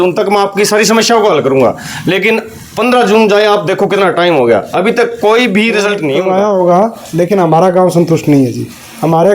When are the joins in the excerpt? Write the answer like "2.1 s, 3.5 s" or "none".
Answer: 6.1 s